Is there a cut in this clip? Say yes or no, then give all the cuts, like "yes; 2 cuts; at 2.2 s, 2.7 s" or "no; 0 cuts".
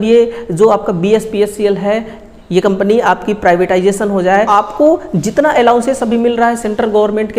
yes; 1 cut; at 4.5 s